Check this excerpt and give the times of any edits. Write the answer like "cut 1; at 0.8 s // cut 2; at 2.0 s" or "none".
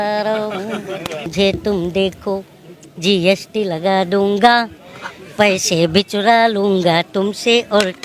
cut 1; at 1.3 s

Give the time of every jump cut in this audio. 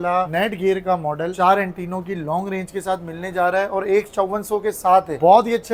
none

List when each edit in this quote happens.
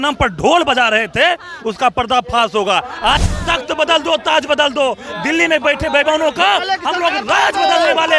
cut 1; at 3.2 s

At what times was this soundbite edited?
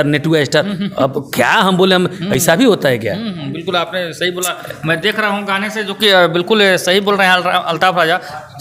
none

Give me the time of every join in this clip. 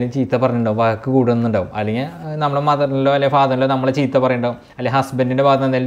none

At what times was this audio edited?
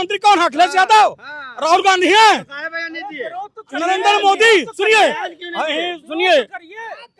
none

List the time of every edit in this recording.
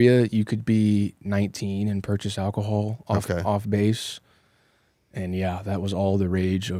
none

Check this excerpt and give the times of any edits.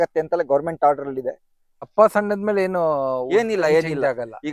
cut 1; at 1.9 s

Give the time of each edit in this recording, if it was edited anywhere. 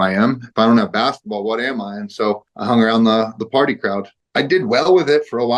cut 1; at 2.5 s // cut 2; at 4.2 s

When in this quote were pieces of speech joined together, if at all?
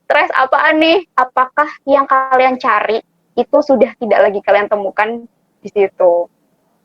cut 1; at 1.1 s

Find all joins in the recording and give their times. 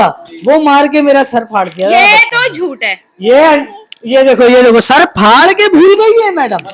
none

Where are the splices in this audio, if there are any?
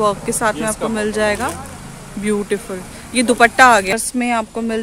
cut 1; at 3.9 s

